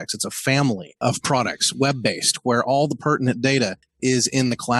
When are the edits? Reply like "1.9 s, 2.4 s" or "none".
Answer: 3.8 s